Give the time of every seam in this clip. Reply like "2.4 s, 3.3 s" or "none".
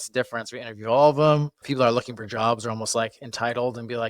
1.6 s

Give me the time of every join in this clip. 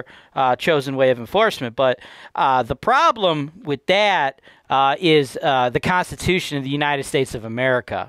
none

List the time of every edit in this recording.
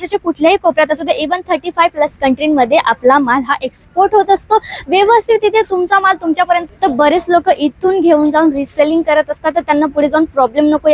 6.7 s

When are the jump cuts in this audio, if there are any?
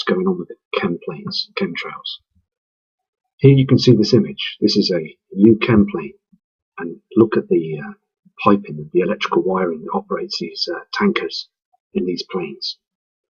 8.0 s

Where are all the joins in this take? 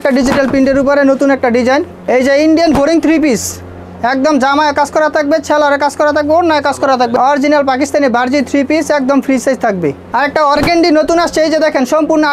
2.0 s, 7.1 s, 10.1 s

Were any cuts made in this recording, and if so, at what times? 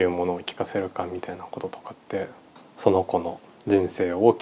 2.6 s

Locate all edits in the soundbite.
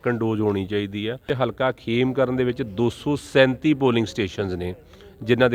1.3 s

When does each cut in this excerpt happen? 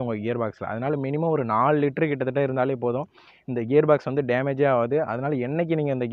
none

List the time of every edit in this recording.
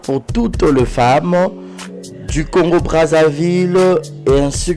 none

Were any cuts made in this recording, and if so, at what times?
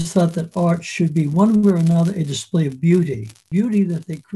3.5 s

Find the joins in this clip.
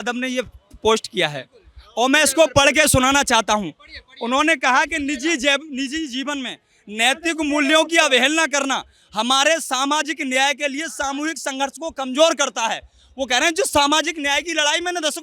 none

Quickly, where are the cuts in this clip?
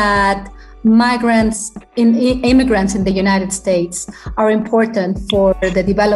none

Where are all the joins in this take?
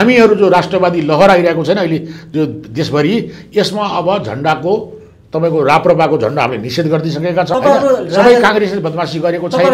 7.5 s

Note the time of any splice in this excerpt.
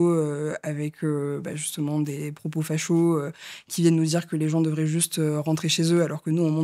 none

